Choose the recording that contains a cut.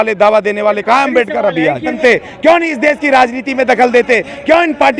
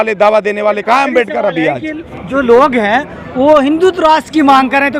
first; 1 cut; at 1.9 s

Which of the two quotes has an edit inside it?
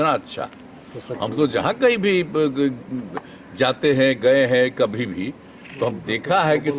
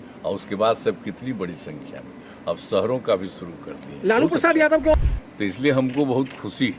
second; 1 cut; at 4.9 s

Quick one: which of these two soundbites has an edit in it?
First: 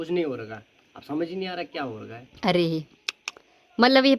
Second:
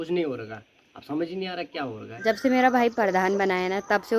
second; 1 cut; at 2.2 s

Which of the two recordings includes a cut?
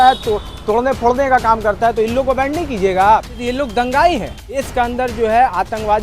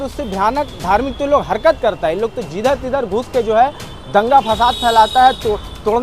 first; 2 cuts; at 3.4 s, 4.6 s

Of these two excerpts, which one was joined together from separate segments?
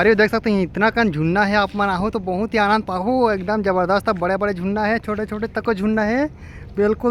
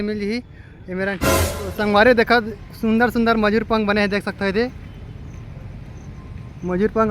second; 1 cut; at 1.3 s

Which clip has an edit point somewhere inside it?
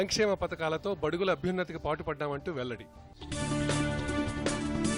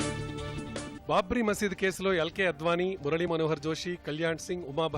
second; 1 cut; at 0.9 s

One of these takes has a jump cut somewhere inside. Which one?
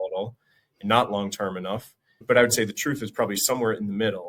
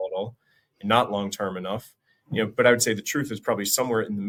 first; 1 cut; at 2.2 s

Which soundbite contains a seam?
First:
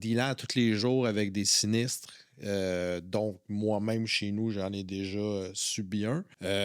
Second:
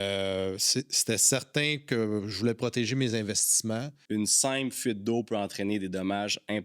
second; 1 cut; at 4.0 s

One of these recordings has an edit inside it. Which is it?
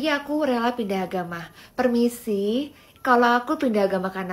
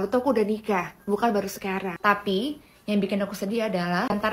second; 1 cut; at 1.9 s

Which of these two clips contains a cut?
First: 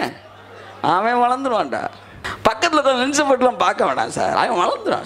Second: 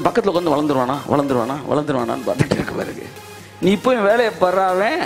first; 1 cut; at 2.2 s

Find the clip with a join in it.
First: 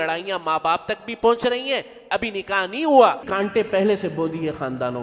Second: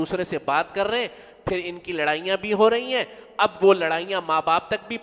first; 1 cut; at 3.2 s

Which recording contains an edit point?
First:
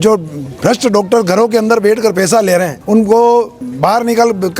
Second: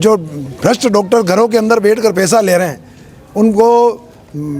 first; 2 cuts; at 2.8 s, 3.6 s

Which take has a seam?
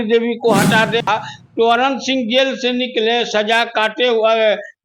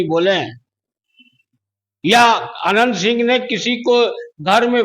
first; 1 cut; at 1.1 s

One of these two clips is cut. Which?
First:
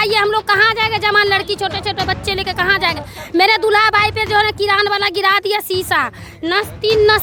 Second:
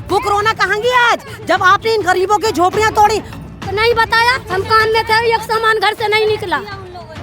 second; 1 cut; at 3.4 s

